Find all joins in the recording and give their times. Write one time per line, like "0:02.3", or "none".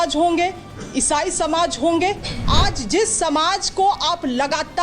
0:02.3